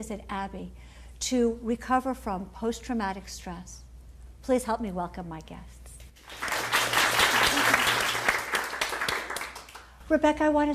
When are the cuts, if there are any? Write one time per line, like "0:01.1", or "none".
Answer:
0:08.4